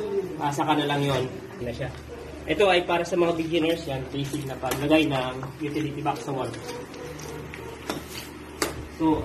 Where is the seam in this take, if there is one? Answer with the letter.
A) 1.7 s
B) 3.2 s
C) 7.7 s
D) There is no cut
A